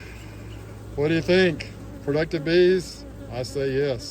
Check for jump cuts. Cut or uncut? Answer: uncut